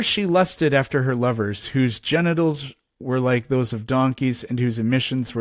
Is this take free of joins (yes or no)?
yes